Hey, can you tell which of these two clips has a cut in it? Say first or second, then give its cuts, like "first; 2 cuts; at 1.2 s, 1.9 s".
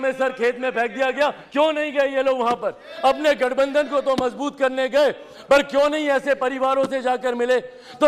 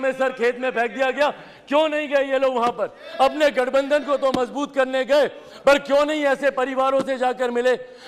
first; 1 cut; at 1.4 s